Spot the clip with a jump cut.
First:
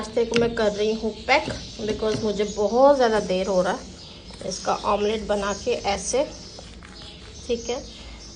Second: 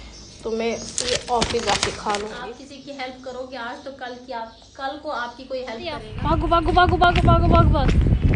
second; 2 cuts; at 2.4 s, 6.1 s

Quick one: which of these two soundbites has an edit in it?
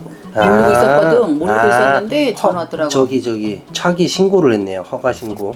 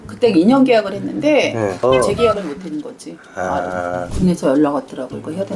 second; 1 cut; at 4.1 s

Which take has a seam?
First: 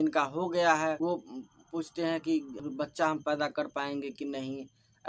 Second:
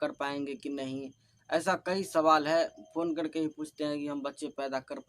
first; 2 cuts; at 1.0 s, 2.6 s

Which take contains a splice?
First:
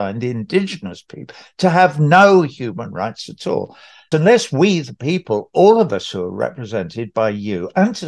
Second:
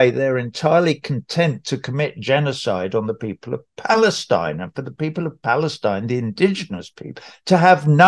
first; 1 cut; at 4.1 s

